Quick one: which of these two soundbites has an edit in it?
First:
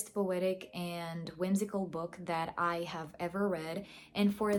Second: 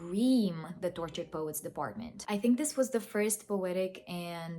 second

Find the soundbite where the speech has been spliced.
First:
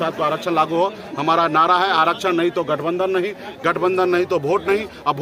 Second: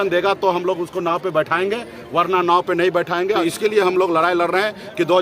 second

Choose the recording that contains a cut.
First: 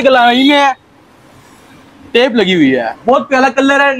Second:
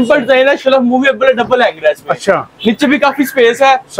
first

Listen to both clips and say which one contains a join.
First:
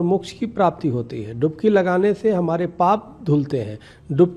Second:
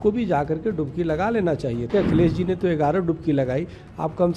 second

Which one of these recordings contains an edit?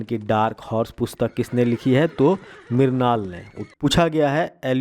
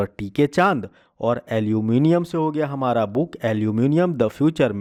first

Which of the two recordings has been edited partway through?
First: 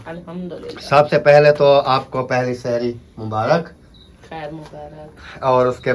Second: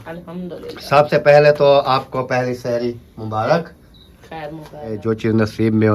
second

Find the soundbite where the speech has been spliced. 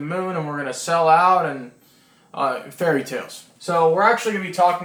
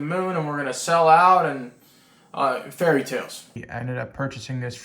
second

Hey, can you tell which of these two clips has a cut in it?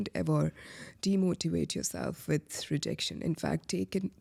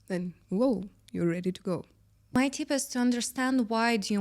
second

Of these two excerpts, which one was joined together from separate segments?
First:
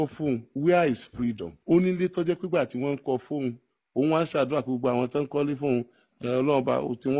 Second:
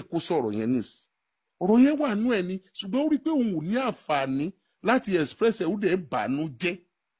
first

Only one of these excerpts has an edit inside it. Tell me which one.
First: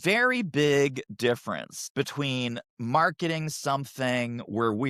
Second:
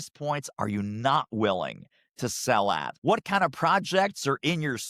second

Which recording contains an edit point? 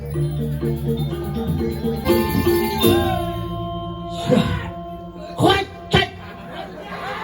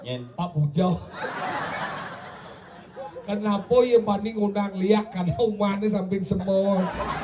first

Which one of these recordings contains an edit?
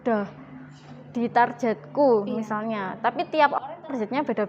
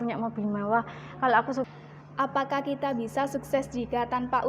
second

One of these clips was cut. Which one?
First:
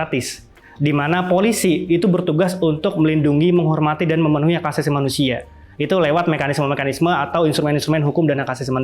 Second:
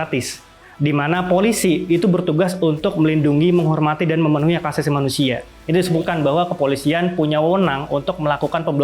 second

